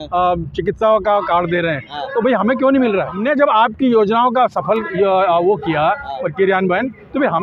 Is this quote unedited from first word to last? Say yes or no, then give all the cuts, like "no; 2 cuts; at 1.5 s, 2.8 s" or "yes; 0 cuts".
no; 1 cut; at 3.1 s